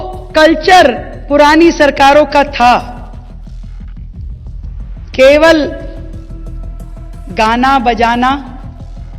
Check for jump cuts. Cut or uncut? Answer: uncut